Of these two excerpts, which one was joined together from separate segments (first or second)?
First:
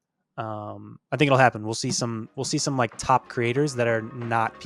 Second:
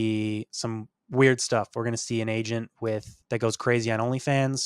second